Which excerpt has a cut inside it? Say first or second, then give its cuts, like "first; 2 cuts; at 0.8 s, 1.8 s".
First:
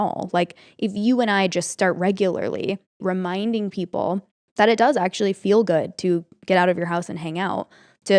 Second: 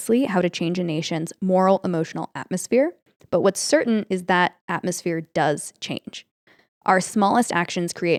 first; 2 cuts; at 3.0 s, 4.4 s